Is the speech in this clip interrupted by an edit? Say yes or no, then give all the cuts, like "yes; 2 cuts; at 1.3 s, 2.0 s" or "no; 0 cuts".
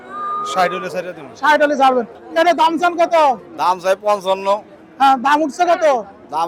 yes; 1 cut; at 2.2 s